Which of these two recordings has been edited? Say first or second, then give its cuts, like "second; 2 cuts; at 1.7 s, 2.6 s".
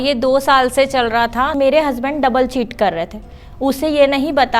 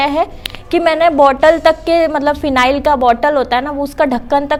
first; 1 cut; at 1.5 s